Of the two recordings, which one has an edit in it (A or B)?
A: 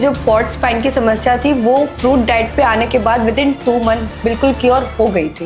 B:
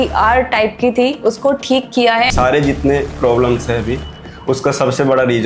B